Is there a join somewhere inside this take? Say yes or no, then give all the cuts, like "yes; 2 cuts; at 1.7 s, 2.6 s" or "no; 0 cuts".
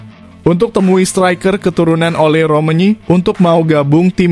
no; 0 cuts